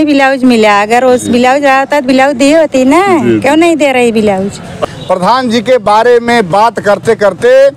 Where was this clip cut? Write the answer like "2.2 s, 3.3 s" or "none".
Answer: 4.8 s